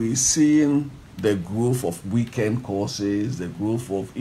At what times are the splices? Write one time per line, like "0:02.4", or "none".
0:01.0